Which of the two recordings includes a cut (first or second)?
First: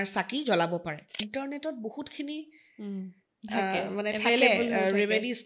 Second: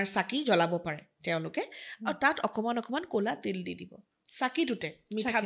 first